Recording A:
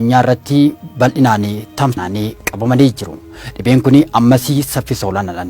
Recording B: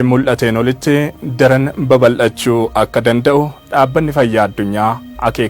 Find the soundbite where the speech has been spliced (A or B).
A